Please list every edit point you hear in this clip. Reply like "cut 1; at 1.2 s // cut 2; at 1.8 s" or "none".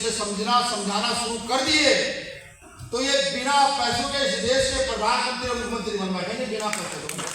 none